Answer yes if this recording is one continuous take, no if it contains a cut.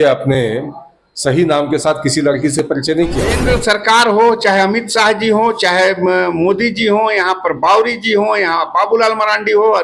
no